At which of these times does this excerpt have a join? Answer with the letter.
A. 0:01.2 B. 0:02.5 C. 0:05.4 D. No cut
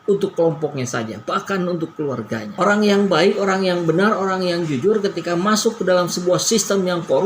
B